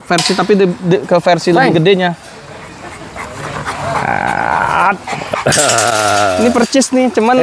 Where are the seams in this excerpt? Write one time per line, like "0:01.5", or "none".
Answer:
none

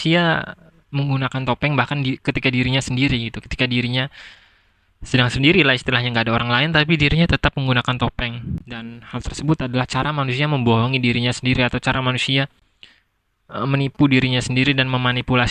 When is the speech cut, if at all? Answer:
none

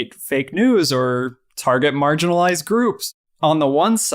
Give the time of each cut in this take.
0:03.0

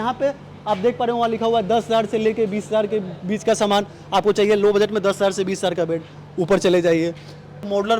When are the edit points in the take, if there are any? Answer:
none

